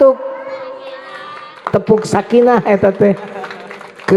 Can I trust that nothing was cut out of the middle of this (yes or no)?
no